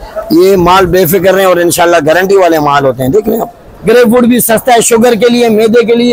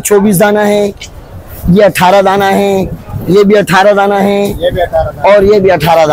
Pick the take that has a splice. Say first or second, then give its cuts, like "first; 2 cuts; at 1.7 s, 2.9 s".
first; 1 cut; at 3.7 s